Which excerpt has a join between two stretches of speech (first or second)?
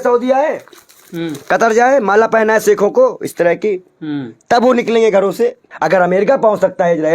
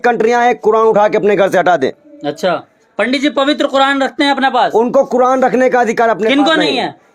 first